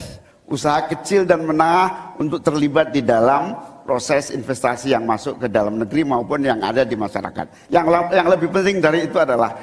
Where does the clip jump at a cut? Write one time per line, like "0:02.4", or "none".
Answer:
0:07.6